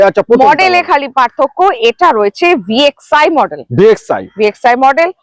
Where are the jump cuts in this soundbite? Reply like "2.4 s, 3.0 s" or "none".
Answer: none